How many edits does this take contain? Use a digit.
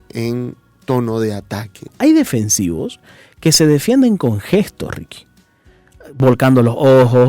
1